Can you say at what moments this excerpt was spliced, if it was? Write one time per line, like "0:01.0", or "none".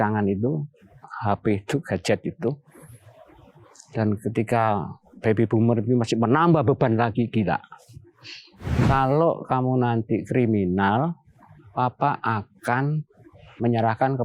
0:08.7